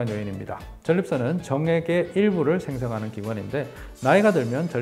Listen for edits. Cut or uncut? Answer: uncut